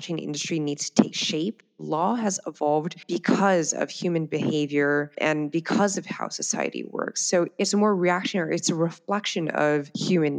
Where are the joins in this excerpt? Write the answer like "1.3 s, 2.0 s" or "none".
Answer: 1.7 s